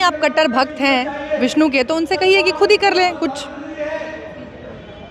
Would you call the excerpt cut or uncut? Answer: uncut